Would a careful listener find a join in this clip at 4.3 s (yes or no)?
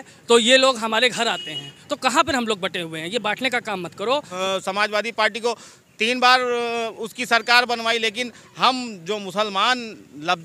yes